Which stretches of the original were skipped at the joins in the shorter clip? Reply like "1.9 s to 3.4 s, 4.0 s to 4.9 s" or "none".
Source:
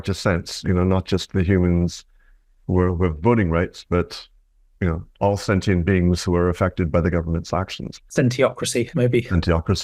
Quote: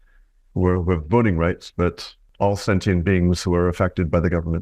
4.4 s to 5.1 s